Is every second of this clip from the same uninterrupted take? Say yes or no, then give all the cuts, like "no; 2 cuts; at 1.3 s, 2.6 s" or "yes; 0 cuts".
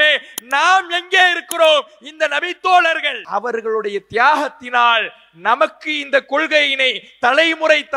no; 1 cut; at 3.1 s